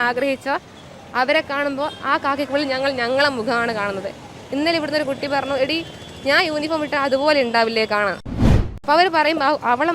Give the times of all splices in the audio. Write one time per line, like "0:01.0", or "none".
0:08.3